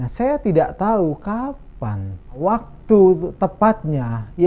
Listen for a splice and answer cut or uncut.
cut